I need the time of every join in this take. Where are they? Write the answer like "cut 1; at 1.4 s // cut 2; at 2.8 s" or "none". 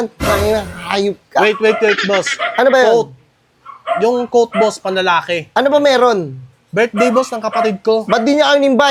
none

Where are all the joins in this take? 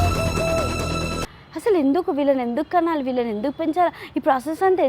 cut 1; at 1.2 s

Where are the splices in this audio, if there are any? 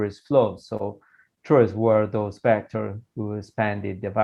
none

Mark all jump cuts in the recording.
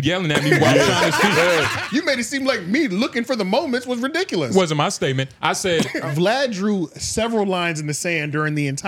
cut 1; at 1.8 s // cut 2; at 5.9 s

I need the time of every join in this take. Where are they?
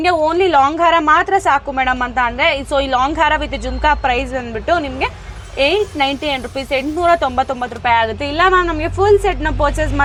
none

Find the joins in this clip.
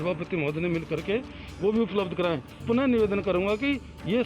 cut 1; at 2.6 s

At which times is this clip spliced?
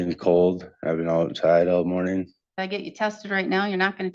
none

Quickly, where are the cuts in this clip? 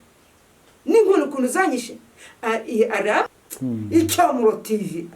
cut 1; at 3.3 s

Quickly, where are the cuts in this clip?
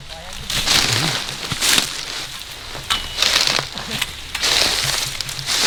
none

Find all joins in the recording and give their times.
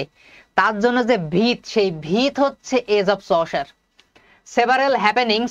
none

